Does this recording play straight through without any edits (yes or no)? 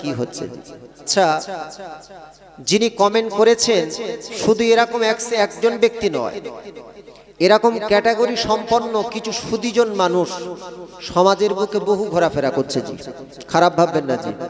no